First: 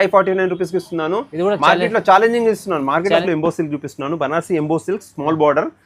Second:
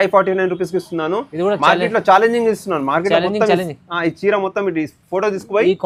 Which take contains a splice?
first; 1 cut; at 3.2 s

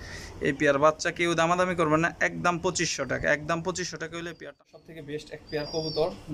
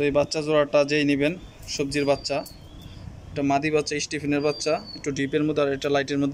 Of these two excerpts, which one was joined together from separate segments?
first; 1 cut; at 4.3 s

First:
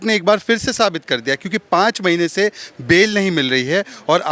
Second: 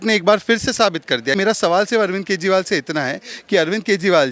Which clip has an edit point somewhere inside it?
second; 1 cut; at 1.4 s

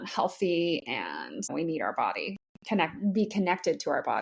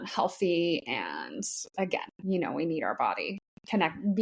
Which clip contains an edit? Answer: first; 1 cut; at 1.5 s

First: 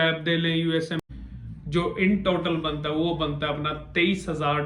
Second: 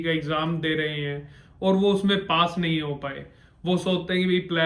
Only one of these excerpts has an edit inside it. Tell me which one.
first; 1 cut; at 1.0 s

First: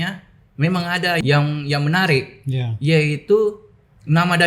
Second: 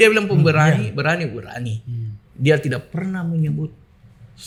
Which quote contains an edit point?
first; 1 cut; at 1.2 s

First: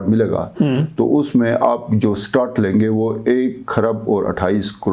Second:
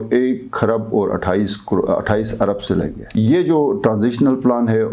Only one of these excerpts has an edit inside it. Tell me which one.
second; 1 cut; at 3.0 s

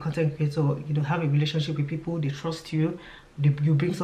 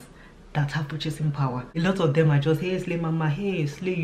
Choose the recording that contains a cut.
second; 1 cut; at 1.7 s

